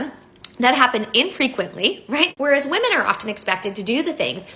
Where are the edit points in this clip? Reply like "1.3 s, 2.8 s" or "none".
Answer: 2.3 s